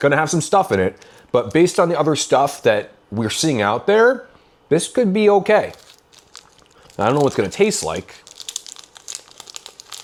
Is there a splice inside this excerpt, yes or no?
no